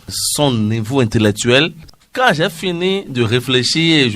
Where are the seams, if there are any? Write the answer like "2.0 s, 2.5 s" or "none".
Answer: 1.9 s